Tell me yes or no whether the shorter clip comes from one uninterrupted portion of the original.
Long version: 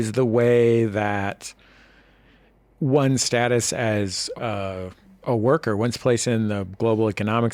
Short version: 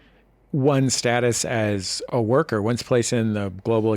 no